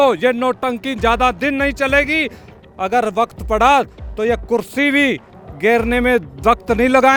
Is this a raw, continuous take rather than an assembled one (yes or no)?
yes